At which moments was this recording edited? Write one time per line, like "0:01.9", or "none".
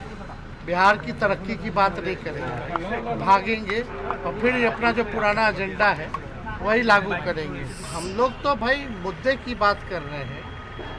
0:07.9